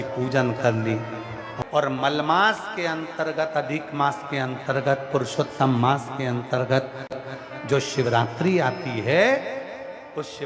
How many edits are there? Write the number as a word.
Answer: two